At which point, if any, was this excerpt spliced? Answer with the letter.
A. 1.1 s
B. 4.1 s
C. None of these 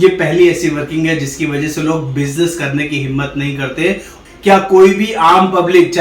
B